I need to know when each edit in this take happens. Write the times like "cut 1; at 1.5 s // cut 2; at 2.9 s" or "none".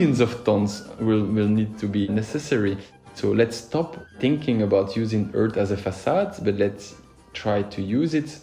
cut 1; at 3.1 s